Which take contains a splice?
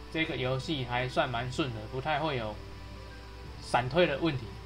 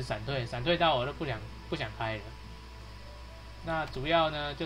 first; 1 cut; at 2.2 s

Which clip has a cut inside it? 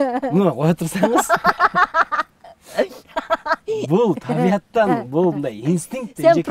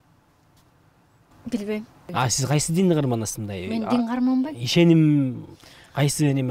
second; 1 cut; at 2.0 s

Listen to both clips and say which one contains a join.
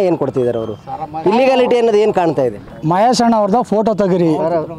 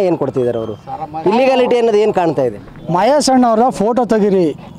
first; 1 cut; at 2.7 s

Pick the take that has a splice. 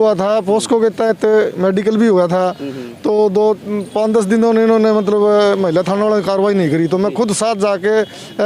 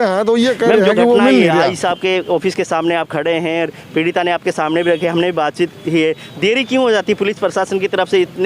second; 1 cut; at 1.7 s

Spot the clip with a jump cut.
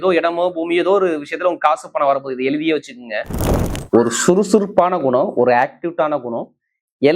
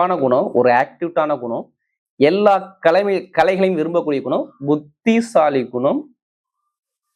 first; 1 cut; at 3.7 s

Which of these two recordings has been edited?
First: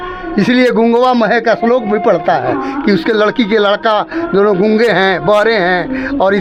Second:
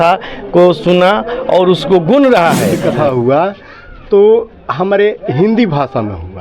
second; 1 cut; at 2.9 s

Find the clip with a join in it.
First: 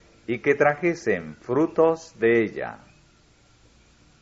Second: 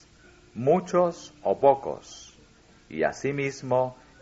second; 1 cut; at 1.1 s

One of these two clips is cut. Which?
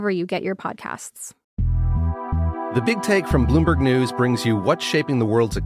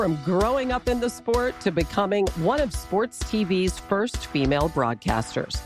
first; 1 cut; at 1.4 s

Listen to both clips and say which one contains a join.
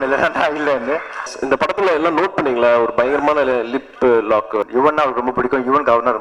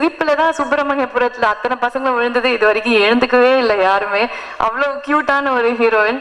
first; 2 cuts; at 1.3 s, 4.7 s

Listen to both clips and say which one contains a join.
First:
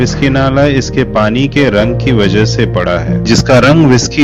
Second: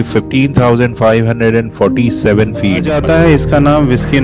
second; 1 cut; at 2.9 s

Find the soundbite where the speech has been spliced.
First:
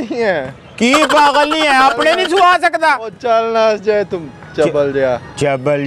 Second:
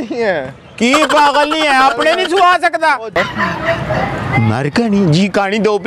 second; 1 cut; at 3.2 s

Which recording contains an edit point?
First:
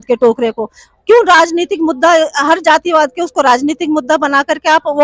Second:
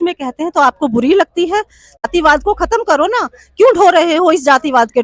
second; 1 cut; at 2.0 s

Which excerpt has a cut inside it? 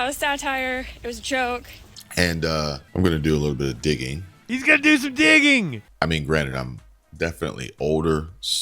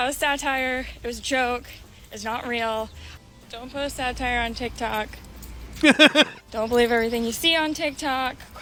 first; 3 cuts; at 1.9 s, 2.8 s, 5.8 s

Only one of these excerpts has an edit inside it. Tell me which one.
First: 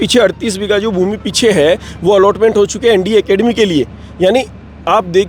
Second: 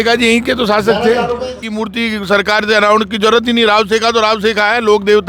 second; 1 cut; at 1.6 s

